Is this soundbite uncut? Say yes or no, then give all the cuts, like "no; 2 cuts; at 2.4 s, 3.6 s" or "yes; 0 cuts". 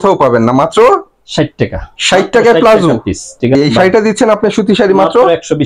no; 1 cut; at 3.6 s